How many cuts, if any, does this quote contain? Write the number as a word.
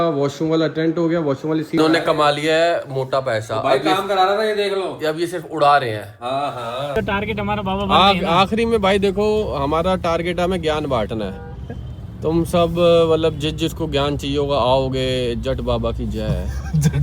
two